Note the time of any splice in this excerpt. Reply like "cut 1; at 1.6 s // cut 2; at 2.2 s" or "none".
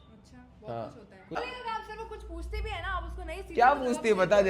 cut 1; at 1.4 s